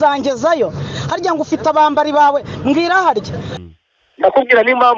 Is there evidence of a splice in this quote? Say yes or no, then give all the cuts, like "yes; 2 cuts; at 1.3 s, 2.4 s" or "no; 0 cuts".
yes; 1 cut; at 3.4 s